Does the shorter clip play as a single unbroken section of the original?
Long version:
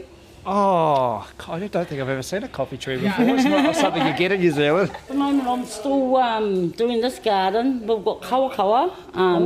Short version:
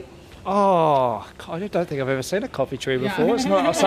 yes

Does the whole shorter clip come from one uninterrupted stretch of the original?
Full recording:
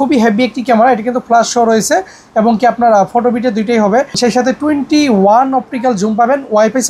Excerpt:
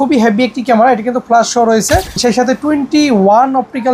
no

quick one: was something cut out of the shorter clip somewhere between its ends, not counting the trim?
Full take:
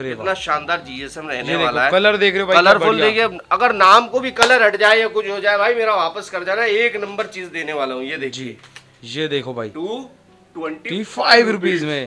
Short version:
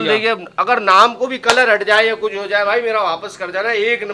no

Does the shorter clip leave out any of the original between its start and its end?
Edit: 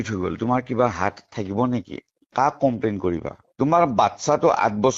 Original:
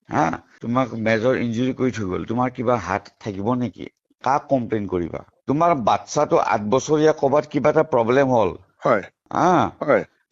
no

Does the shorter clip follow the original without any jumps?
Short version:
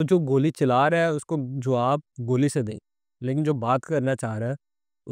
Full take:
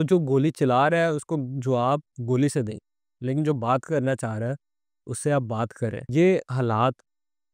yes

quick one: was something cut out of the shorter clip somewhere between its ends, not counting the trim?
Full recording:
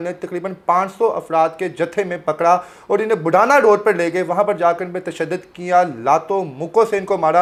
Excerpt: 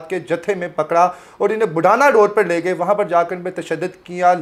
no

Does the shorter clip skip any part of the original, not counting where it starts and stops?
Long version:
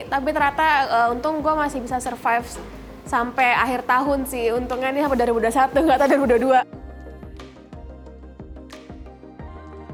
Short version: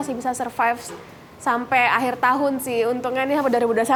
no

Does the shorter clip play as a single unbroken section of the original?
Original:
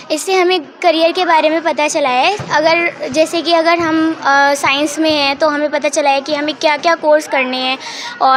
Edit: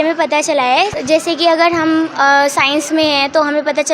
no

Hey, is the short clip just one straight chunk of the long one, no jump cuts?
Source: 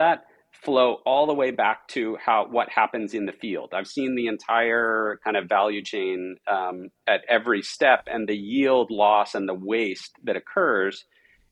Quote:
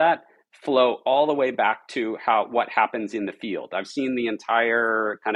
yes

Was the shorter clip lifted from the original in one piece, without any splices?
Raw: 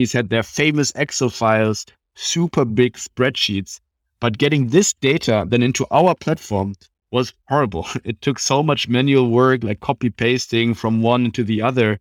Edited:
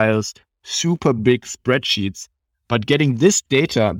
yes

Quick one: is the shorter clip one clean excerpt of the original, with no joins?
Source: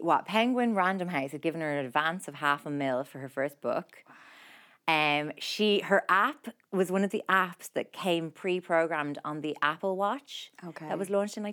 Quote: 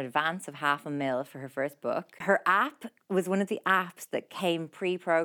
no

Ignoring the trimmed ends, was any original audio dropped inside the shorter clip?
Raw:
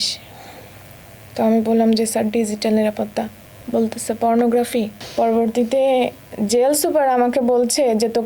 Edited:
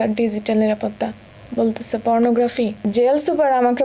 yes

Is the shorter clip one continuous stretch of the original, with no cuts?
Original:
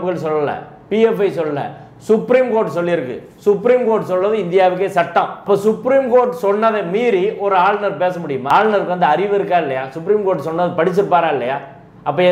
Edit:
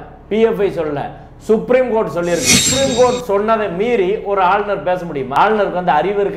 no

